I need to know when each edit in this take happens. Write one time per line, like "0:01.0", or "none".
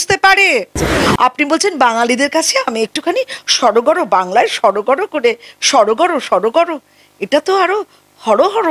0:01.0